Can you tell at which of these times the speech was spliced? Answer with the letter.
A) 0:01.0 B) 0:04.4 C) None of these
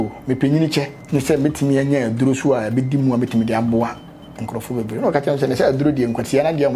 A